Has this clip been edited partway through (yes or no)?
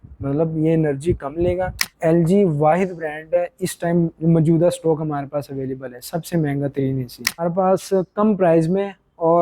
yes